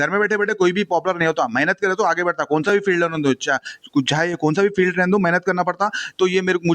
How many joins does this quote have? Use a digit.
0